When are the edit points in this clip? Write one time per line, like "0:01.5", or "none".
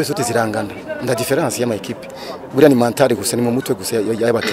none